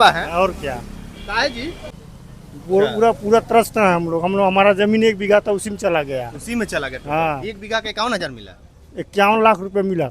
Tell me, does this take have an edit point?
yes; 1 cut; at 1.9 s

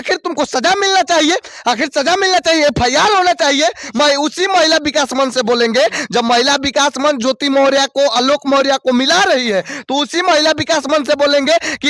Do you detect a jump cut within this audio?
no; 0 cuts

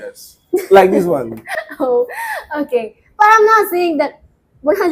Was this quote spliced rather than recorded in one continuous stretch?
no; 0 cuts

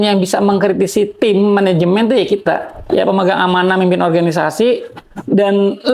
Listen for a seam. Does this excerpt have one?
yes; 1 cut; at 2.8 s

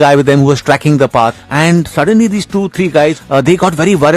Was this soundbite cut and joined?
yes; 2 cuts; at 1.4 s, 3.2 s

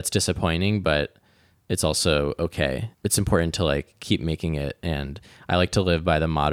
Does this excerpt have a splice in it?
yes; 1 cut; at 2.9 s

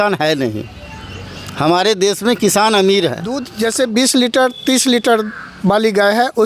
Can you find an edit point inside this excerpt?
yes; 1 cut; at 3.5 s

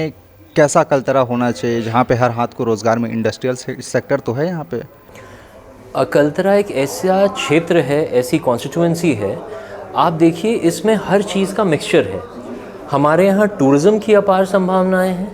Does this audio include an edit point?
no; 0 cuts

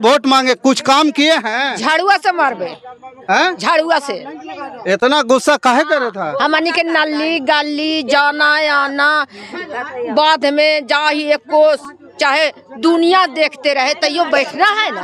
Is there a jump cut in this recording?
no; 0 cuts

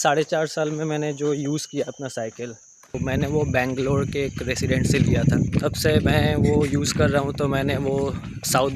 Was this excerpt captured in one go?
no; 2 cuts; at 3.0 s, 5.5 s

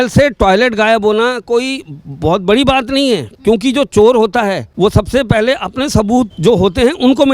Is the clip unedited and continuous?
no; 2 cuts; at 4.7 s, 6.3 s

